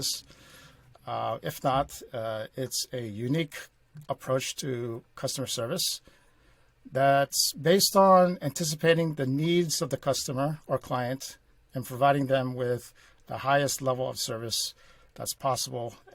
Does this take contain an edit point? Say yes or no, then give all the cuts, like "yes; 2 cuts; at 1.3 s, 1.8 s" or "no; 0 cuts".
no; 0 cuts